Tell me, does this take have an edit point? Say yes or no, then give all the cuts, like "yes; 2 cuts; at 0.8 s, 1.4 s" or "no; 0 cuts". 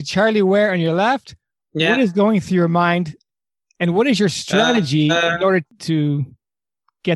yes; 1 cut; at 5.7 s